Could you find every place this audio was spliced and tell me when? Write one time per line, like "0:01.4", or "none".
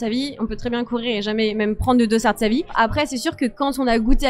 0:02.7